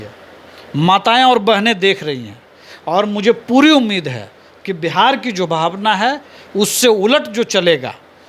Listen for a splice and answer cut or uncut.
uncut